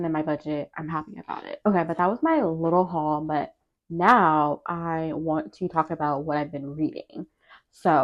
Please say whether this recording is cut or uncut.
uncut